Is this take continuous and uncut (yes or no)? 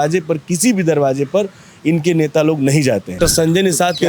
no